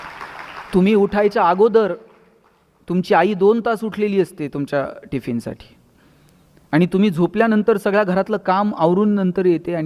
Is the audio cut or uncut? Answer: uncut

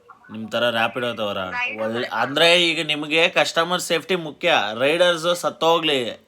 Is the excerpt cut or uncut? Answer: cut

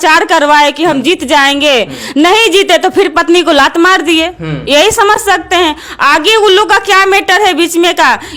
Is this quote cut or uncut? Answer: uncut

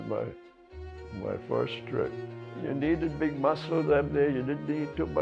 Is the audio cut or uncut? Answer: uncut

